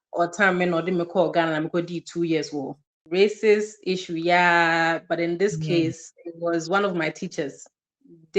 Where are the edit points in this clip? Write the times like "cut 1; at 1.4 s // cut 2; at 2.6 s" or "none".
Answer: cut 1; at 2.9 s

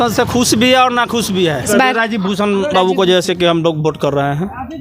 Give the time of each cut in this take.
cut 1; at 1.7 s

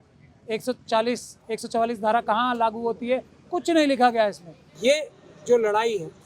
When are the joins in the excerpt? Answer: cut 1; at 4.7 s

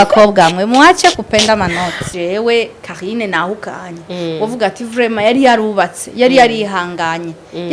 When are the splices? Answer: cut 1; at 2.1 s

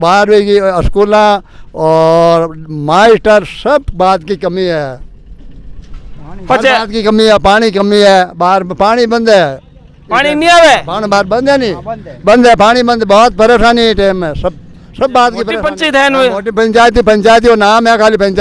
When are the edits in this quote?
cut 1; at 15.5 s

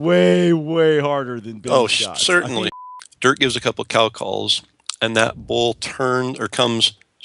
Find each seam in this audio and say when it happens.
cut 1; at 2.7 s

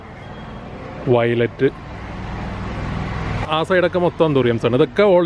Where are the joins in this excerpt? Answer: cut 1; at 3.4 s

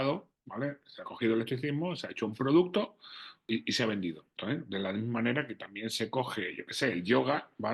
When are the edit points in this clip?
cut 1; at 3.4 s // cut 2; at 4.3 s

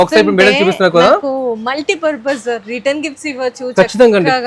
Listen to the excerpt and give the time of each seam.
none

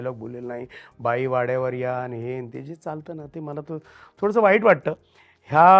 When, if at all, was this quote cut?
none

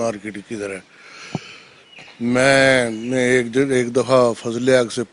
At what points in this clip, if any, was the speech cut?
none

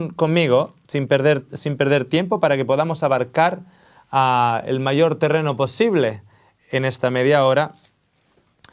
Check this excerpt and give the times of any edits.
cut 1; at 2.9 s

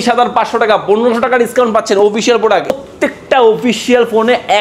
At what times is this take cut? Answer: cut 1; at 2.7 s

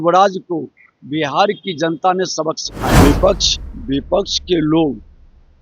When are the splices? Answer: cut 1; at 3.0 s

